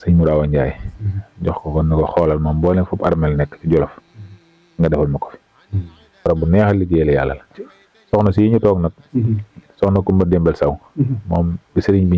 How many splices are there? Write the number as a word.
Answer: one